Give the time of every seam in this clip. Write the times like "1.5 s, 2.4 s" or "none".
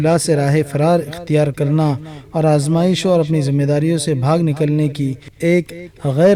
none